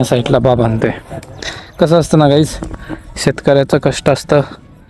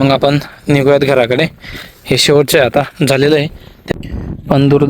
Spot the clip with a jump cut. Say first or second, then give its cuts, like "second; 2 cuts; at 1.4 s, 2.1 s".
second; 1 cut; at 3.7 s